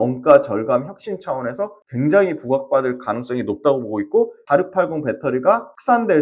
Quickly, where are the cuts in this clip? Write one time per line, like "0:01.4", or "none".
0:04.4